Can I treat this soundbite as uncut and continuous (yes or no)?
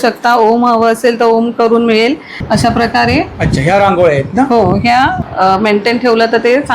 no